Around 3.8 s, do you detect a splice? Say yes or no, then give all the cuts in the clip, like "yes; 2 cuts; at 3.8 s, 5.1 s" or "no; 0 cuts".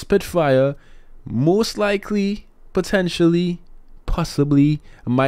no; 0 cuts